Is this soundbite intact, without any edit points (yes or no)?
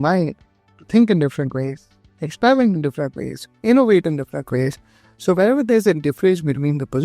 no